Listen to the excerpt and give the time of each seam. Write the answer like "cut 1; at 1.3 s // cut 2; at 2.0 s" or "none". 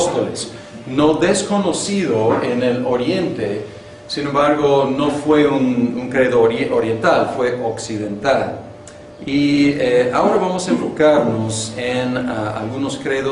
cut 1; at 11.2 s